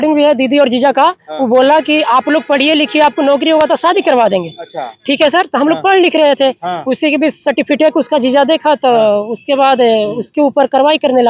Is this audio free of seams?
yes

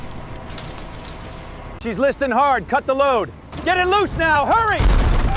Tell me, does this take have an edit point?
yes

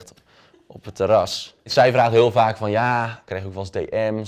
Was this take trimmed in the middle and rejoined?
yes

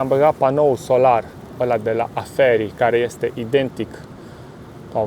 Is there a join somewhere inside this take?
no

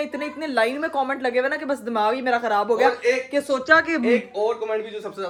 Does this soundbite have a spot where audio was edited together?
no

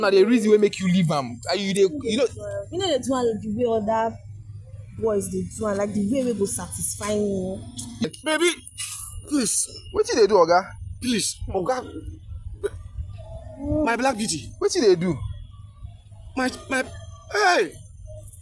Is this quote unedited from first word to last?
no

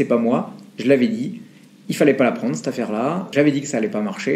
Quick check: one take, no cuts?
yes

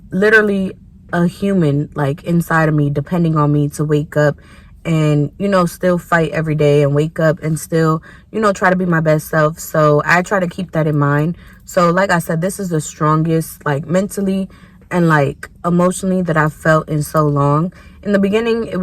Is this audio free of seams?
yes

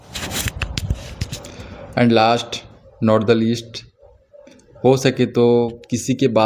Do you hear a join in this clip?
no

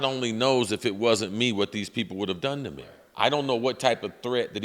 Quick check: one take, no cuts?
no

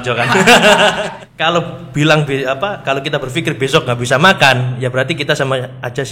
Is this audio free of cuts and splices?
no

